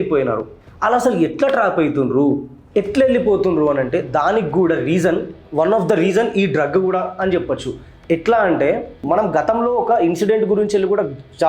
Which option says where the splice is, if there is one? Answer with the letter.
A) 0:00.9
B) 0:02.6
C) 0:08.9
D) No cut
C